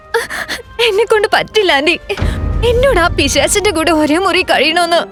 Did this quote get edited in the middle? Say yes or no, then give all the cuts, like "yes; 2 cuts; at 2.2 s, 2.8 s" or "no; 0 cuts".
no; 0 cuts